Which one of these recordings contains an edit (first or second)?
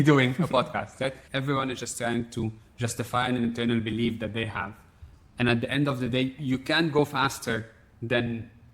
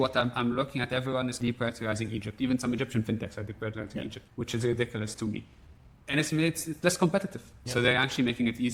first